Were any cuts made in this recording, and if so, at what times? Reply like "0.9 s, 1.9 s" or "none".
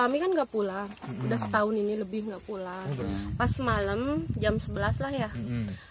3.0 s